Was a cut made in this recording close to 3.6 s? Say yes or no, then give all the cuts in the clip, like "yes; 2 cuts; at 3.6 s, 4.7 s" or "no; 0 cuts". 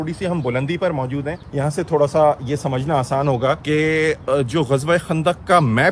yes; 2 cuts; at 1.4 s, 3.6 s